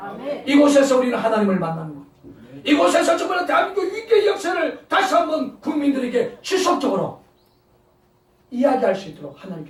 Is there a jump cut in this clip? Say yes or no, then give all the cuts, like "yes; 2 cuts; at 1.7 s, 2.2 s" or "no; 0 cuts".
no; 0 cuts